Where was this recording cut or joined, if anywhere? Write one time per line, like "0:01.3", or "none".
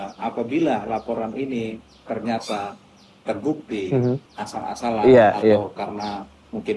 0:04.3